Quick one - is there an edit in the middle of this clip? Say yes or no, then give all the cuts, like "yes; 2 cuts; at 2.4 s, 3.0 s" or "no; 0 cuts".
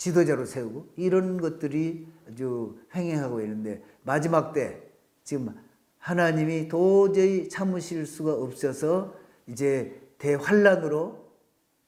no; 0 cuts